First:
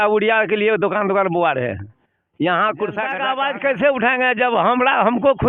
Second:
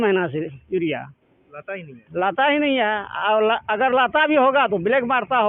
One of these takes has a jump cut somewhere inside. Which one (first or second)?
first